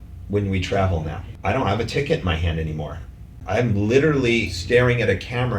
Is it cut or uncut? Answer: cut